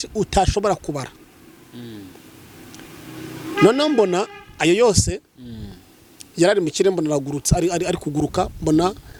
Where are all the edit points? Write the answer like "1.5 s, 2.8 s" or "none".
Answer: none